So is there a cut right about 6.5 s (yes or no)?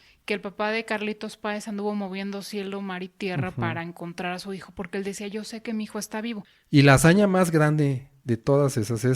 yes